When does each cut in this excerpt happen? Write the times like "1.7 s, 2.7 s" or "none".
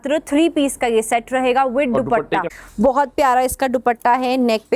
2.5 s